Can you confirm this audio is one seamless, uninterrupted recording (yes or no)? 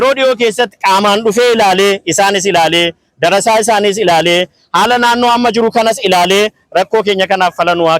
yes